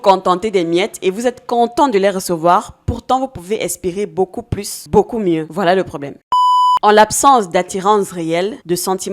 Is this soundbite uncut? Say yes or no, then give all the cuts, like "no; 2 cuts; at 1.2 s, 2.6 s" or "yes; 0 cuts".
no; 1 cut; at 6.2 s